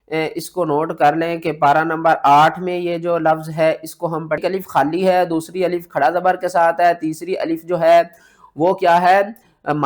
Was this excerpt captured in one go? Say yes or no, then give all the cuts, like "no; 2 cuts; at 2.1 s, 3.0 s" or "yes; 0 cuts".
no; 1 cut; at 4.4 s